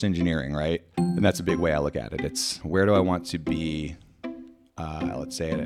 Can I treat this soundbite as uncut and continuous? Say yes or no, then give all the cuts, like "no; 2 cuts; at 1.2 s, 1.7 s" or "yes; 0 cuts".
no; 2 cuts; at 1.0 s, 2.6 s